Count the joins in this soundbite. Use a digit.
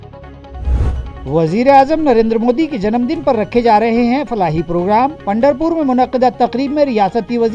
1